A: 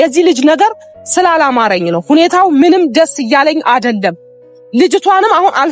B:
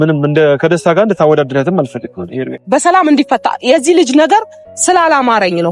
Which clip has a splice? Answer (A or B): B